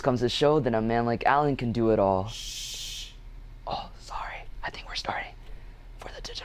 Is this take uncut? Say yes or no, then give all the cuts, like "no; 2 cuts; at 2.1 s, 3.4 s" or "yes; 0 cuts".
yes; 0 cuts